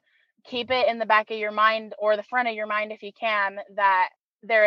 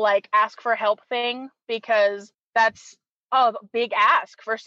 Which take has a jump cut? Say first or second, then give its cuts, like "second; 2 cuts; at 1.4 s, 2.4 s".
second; 1 cut; at 2.3 s